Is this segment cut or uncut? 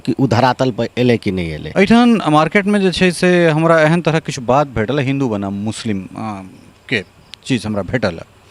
cut